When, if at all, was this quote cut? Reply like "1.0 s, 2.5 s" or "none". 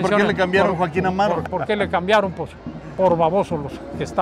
1.4 s